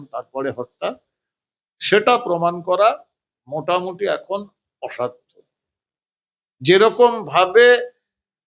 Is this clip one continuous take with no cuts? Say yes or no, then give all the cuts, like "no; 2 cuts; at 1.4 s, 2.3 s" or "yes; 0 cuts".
yes; 0 cuts